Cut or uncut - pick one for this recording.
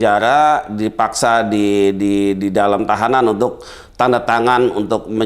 uncut